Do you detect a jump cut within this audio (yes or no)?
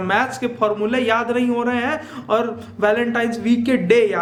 no